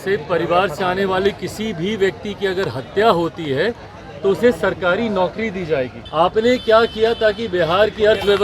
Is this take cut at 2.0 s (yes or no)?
no